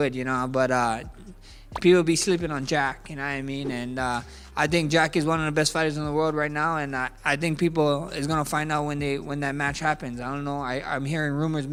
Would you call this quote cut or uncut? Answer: uncut